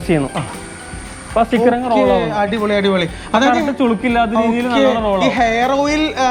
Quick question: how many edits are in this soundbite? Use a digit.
0